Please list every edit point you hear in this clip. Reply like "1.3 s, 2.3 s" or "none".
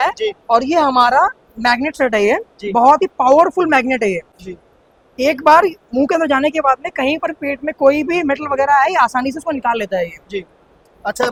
none